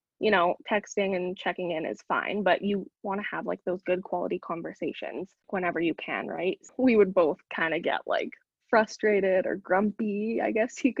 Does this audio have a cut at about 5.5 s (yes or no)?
yes